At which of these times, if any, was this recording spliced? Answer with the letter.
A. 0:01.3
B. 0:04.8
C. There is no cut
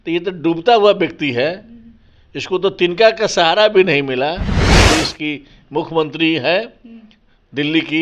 B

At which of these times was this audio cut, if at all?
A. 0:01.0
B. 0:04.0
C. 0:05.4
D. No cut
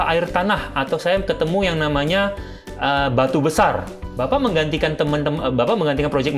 B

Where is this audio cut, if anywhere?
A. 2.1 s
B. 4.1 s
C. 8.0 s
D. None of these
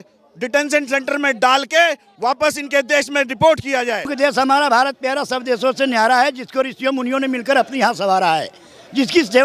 B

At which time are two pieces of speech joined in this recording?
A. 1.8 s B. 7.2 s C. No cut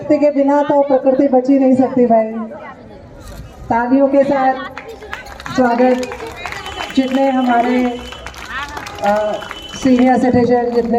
C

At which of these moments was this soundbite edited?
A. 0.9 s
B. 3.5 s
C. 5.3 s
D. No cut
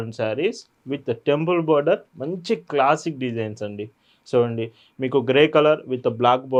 D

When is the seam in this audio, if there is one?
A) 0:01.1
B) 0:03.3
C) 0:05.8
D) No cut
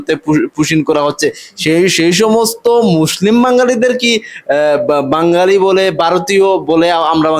D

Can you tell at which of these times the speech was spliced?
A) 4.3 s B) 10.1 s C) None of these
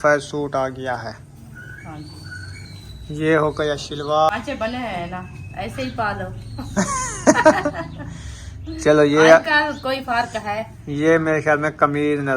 A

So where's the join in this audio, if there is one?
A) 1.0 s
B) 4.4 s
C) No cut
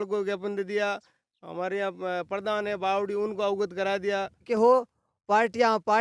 B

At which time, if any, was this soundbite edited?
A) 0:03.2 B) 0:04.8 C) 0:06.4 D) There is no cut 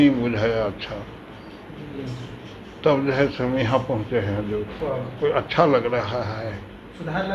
B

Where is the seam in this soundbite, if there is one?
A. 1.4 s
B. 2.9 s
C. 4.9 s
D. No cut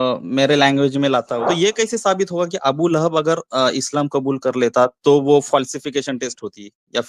A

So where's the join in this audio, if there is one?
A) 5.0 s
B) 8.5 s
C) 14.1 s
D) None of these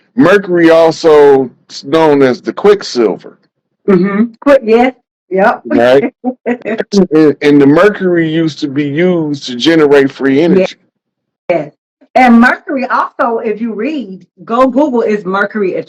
D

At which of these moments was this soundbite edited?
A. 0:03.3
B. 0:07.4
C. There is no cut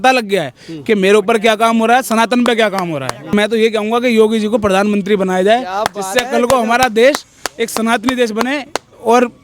A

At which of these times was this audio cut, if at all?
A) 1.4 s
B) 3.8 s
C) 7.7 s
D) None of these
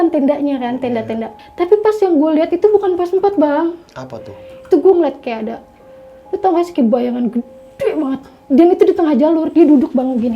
A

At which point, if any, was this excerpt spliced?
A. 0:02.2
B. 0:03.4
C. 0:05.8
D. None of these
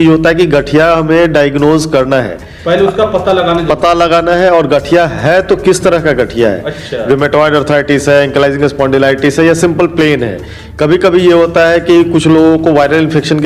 D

